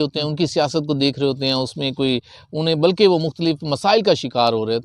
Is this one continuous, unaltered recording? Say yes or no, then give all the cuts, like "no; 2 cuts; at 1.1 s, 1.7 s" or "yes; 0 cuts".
yes; 0 cuts